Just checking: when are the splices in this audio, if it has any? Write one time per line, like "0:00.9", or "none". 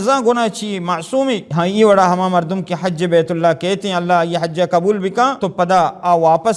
0:01.5
0:05.4